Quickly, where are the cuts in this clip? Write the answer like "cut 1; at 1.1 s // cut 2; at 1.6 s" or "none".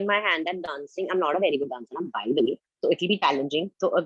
none